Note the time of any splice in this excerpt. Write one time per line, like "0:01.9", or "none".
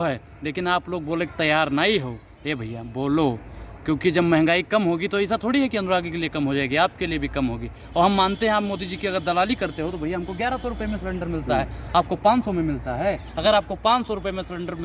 none